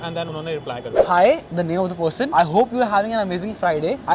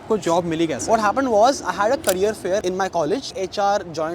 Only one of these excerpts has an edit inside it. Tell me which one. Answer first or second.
first